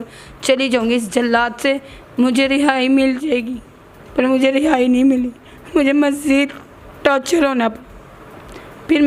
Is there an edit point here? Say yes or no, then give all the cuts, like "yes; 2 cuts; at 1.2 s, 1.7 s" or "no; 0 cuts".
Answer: no; 0 cuts